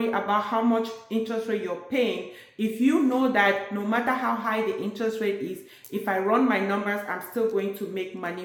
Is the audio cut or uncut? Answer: uncut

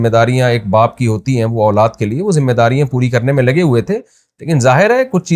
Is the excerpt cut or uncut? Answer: uncut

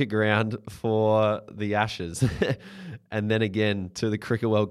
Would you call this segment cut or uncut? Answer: uncut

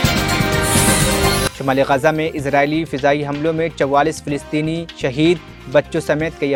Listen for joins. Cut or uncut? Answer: uncut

